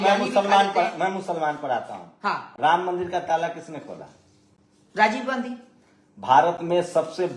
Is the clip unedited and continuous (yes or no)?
yes